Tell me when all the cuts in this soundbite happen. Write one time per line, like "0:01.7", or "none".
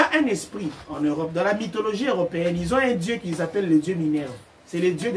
none